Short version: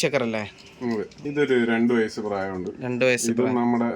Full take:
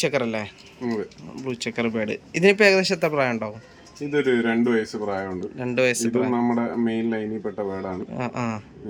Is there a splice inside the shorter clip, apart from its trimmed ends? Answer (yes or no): yes